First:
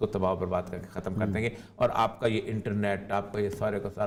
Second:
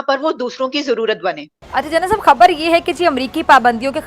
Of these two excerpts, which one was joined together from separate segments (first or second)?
second